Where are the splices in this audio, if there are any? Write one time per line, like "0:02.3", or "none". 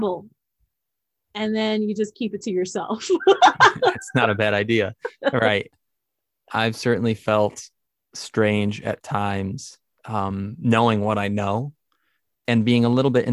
0:05.7